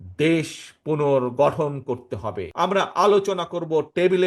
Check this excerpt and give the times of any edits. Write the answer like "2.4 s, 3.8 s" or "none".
2.4 s

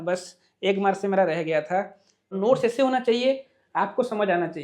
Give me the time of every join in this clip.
2.2 s

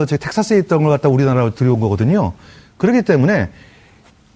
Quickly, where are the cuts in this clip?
none

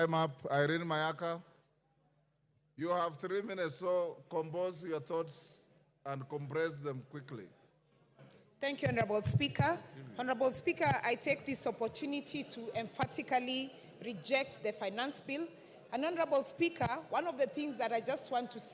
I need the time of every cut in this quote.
2.8 s

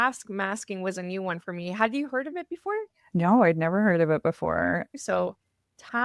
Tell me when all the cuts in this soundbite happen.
4.9 s

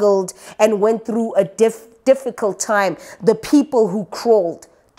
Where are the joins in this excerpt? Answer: none

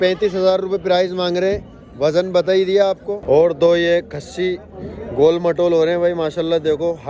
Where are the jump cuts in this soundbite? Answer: 3.1 s

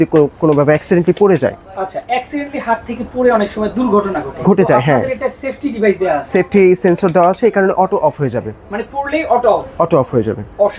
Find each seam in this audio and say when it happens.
none

